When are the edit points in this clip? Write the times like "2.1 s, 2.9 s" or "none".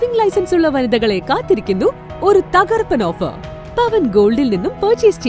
none